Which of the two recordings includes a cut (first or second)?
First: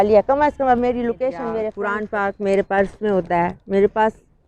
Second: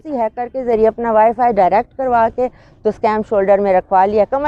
first